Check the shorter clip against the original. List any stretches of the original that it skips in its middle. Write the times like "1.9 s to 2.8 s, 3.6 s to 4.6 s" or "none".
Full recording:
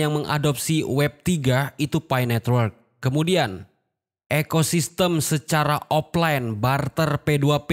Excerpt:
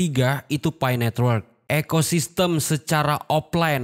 2.8 s to 4.1 s